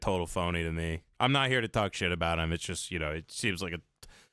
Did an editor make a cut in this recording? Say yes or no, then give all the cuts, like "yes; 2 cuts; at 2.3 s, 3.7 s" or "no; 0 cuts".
no; 0 cuts